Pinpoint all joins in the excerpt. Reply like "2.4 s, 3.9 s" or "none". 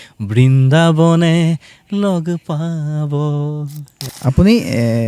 4.1 s